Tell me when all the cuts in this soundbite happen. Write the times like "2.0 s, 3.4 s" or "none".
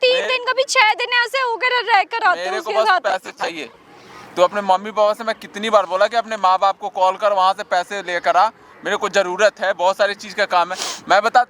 none